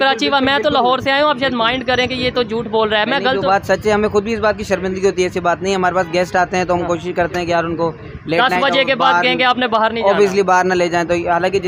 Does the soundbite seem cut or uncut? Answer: uncut